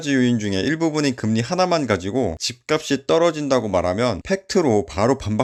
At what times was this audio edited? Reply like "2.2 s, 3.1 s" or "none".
none